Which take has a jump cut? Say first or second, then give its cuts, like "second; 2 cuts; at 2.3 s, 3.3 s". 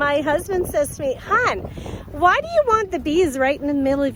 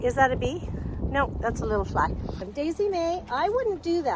second; 1 cut; at 2.4 s